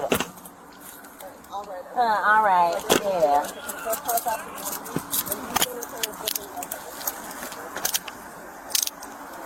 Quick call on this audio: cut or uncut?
uncut